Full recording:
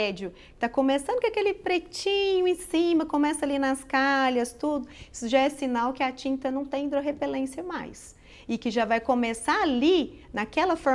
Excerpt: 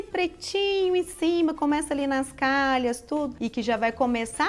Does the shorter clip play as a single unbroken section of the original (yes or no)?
no